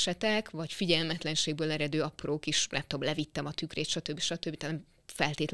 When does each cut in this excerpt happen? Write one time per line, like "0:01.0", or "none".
none